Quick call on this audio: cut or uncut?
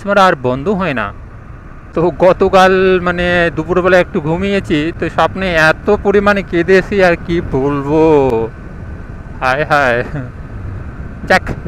uncut